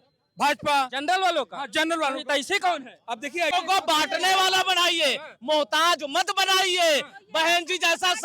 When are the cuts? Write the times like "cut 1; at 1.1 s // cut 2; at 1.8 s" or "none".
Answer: cut 1; at 3.5 s